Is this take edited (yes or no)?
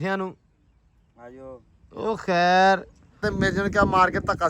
yes